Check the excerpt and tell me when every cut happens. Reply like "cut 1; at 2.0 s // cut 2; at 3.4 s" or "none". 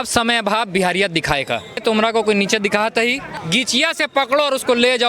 cut 1; at 1.8 s